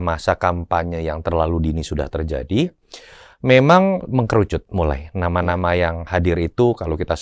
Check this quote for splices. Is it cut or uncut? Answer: uncut